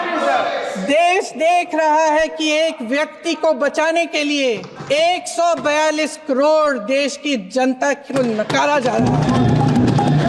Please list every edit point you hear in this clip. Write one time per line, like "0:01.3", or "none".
0:04.7